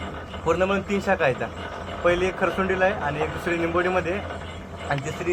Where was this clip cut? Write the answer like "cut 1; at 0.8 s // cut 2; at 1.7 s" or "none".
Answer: none